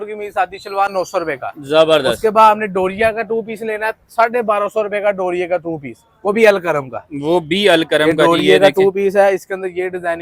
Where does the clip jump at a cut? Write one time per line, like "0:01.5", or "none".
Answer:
none